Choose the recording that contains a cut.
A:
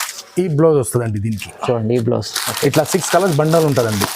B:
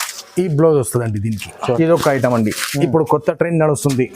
B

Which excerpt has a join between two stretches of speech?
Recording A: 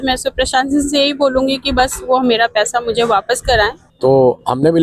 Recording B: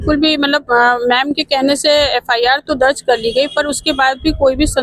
A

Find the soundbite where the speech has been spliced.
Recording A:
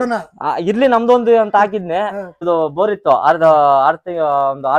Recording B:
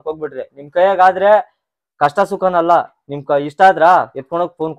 A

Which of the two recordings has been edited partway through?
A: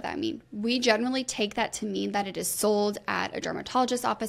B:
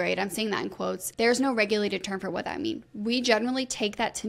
B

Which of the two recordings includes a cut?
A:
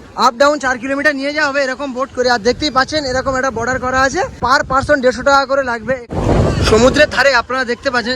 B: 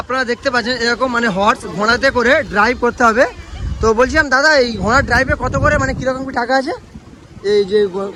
A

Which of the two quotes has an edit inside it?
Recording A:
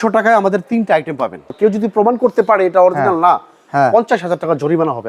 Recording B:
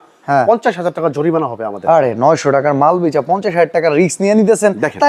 A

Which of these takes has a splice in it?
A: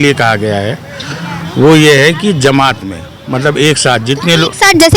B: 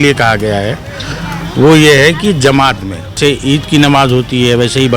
B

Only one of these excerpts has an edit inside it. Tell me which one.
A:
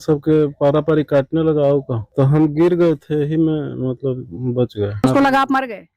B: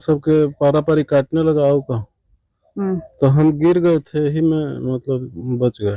A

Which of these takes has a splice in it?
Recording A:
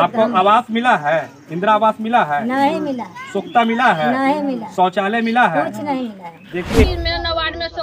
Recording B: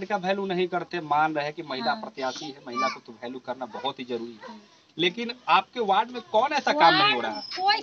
A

